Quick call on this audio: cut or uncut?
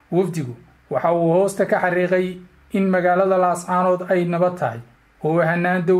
uncut